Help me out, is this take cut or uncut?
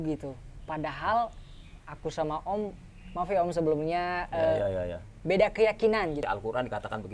cut